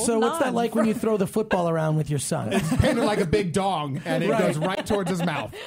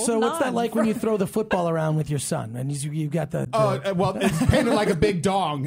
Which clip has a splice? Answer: first; 1 cut; at 2.5 s

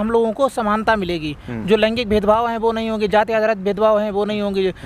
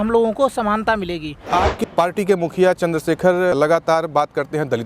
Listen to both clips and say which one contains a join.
second; 1 cut; at 1.3 s

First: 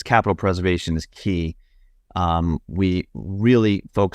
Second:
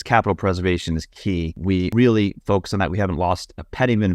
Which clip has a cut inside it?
second; 1 cut; at 1.7 s

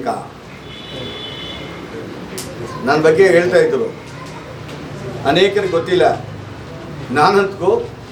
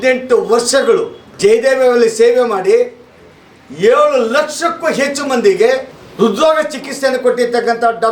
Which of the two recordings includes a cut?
second; 2 cuts; at 1.2 s, 6.0 s

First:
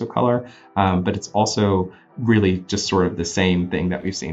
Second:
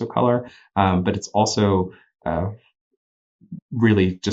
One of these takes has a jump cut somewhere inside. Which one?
first; 1 cut; at 2.0 s

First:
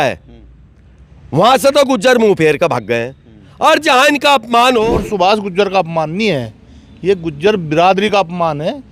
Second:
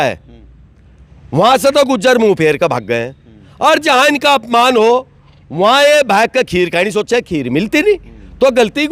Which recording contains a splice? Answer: first; 1 cut; at 5.0 s

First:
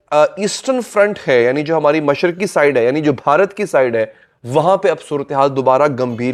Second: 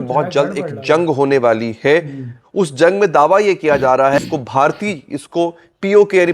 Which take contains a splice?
second; 1 cut; at 4.2 s

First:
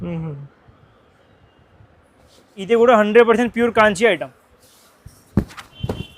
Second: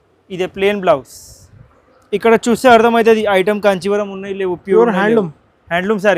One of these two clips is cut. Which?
first; 1 cut; at 2.7 s

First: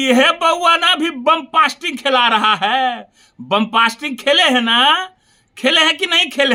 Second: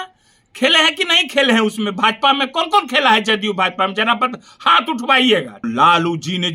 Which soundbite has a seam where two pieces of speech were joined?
second; 1 cut; at 5.6 s

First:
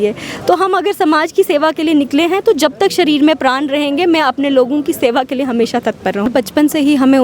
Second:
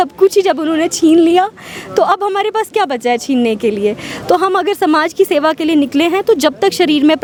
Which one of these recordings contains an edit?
first; 1 cut; at 6.3 s

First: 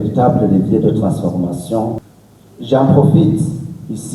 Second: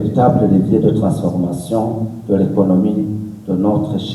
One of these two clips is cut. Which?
first; 1 cut; at 2.0 s

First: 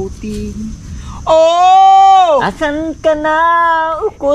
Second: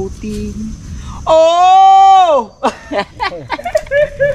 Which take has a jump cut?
first; 1 cut; at 2.5 s

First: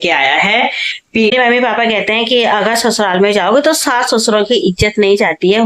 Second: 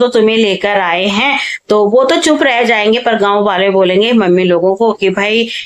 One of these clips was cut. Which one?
first; 1 cut; at 1.3 s

